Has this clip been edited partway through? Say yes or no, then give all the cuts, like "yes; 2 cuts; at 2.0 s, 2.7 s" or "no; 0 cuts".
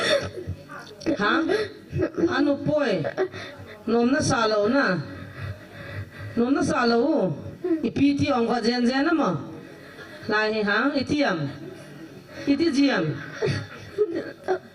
no; 0 cuts